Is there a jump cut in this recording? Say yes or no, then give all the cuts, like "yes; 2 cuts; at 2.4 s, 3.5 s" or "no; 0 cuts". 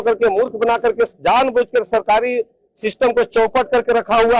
no; 0 cuts